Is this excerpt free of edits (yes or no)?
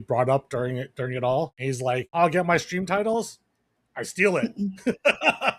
no